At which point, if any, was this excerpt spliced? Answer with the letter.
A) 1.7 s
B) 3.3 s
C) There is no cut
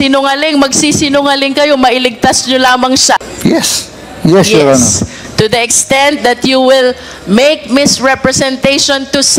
B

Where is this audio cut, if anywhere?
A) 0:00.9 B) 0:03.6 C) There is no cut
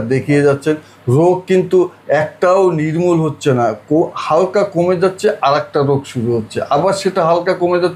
C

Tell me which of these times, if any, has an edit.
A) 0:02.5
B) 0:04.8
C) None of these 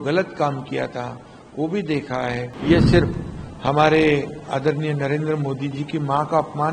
A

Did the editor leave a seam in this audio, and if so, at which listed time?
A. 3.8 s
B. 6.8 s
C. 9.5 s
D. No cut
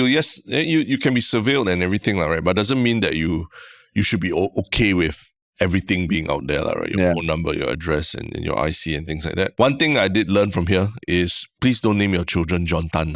C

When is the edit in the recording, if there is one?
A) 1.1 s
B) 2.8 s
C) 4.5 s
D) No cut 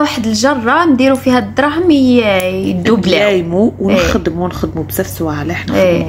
D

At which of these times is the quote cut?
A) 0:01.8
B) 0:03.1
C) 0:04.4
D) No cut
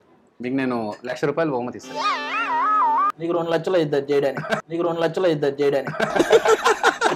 B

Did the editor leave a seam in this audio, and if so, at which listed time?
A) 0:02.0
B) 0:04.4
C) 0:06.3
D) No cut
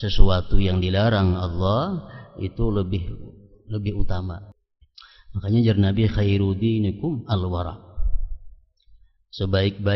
B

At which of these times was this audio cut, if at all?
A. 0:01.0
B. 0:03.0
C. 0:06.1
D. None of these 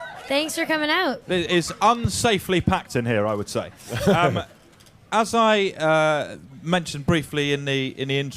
A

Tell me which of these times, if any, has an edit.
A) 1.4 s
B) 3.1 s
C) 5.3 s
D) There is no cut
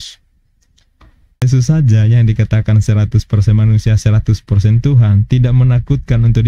A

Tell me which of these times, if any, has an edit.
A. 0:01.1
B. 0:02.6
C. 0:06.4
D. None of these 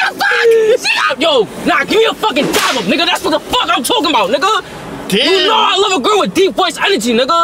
A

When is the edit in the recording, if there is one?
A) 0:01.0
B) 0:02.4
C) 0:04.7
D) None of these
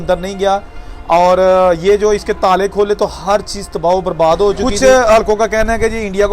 C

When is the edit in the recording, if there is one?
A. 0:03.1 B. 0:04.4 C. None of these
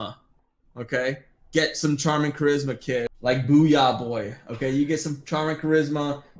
A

